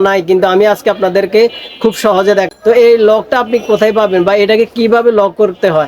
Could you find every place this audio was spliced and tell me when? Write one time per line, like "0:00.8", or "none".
0:02.5